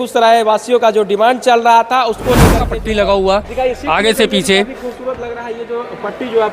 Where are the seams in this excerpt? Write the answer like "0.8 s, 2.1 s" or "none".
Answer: 2.6 s